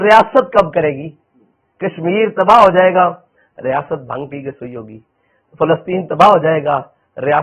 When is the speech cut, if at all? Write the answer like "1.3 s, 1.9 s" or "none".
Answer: none